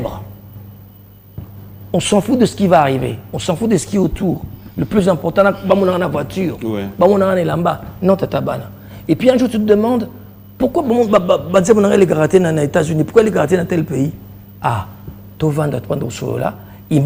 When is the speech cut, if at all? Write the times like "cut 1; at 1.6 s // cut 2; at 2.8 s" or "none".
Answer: none